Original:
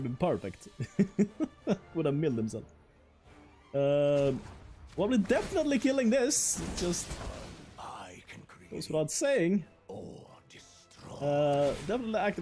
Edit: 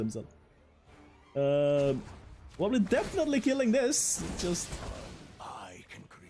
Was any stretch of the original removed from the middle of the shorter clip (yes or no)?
no